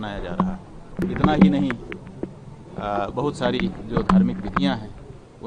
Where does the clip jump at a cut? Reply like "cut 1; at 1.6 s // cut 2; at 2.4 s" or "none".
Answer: cut 1; at 0.9 s